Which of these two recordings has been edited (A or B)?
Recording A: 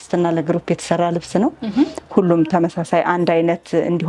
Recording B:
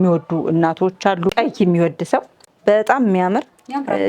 B